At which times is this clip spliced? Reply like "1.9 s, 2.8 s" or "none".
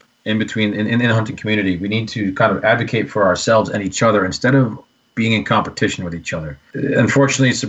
6.6 s